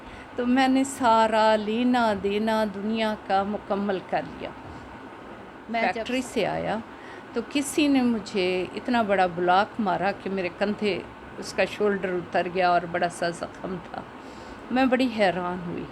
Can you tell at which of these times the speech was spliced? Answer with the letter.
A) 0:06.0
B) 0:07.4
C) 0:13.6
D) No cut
A